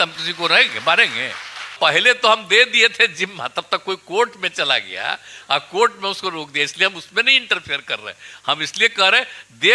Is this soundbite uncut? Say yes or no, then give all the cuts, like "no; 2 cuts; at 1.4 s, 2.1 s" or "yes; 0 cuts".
no; 1 cut; at 1.7 s